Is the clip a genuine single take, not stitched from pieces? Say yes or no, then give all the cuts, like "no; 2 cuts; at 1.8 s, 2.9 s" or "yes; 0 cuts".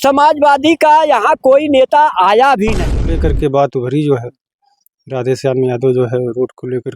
no; 1 cut; at 3.1 s